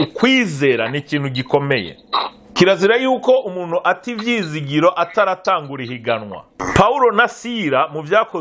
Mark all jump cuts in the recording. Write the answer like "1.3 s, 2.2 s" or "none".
2.5 s, 6.6 s